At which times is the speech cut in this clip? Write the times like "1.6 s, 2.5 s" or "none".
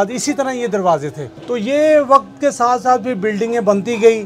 none